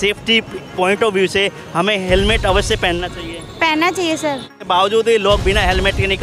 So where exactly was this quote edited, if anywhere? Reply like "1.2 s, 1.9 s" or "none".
4.7 s